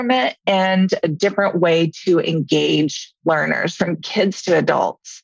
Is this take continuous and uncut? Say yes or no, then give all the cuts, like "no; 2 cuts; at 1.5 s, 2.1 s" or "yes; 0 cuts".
no; 1 cut; at 3.3 s